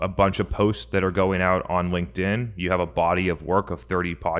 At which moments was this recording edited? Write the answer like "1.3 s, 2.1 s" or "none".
none